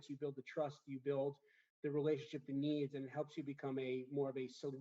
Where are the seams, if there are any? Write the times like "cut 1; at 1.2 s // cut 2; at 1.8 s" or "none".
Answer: none